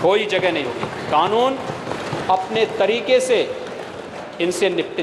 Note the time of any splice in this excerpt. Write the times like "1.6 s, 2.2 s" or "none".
none